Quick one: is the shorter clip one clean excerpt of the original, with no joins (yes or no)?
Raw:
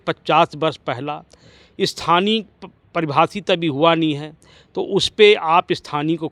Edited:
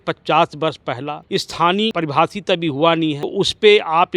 no